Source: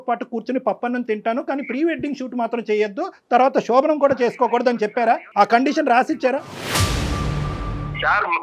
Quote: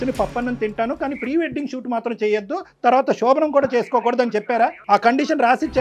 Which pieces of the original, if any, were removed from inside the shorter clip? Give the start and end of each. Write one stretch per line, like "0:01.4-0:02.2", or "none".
none